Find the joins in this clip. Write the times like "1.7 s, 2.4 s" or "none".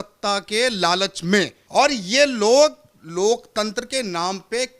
1.6 s